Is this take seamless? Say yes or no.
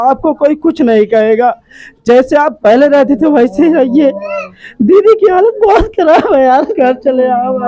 yes